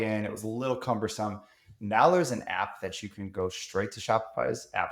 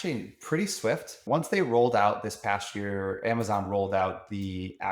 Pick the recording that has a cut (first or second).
second